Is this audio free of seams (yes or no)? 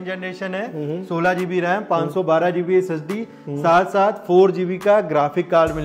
yes